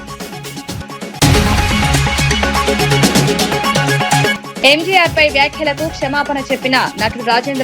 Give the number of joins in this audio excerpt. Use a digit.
2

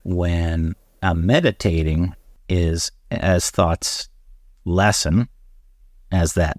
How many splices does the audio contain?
1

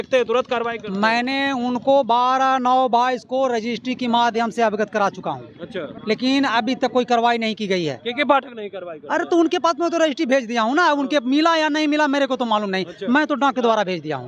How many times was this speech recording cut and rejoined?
1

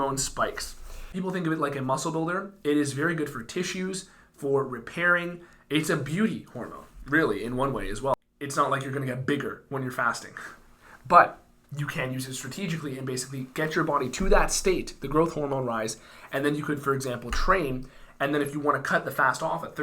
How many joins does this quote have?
2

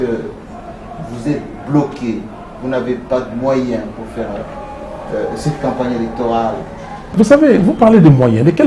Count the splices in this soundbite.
1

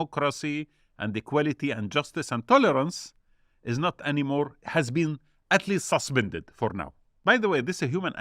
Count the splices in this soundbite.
1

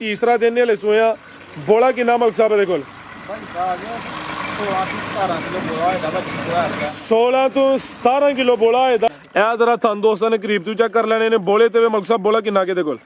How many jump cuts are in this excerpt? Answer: 1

